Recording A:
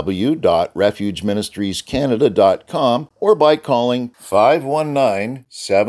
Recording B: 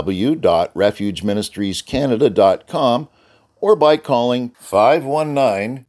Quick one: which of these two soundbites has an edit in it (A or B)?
A